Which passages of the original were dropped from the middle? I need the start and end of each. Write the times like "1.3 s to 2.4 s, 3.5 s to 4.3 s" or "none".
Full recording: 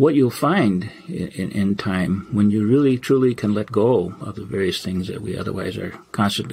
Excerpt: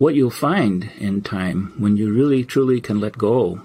0.9 s to 1.5 s